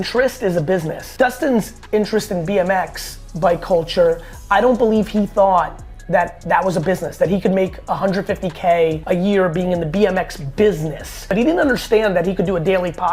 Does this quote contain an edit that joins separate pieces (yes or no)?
no